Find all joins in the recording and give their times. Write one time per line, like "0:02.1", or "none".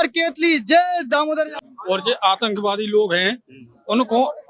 0:01.6